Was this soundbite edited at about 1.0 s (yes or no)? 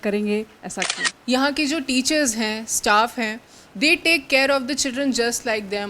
yes